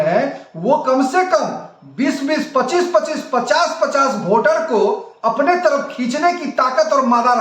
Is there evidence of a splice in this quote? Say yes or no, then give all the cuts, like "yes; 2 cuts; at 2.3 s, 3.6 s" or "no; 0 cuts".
no; 0 cuts